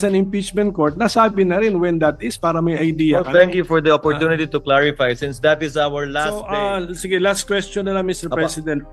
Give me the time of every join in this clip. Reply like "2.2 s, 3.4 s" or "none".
6.1 s